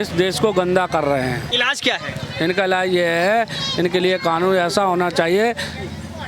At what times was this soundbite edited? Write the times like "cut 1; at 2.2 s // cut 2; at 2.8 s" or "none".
cut 1; at 1.5 s